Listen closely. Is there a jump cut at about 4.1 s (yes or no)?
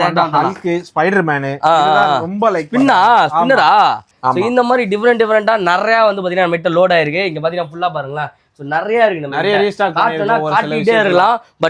yes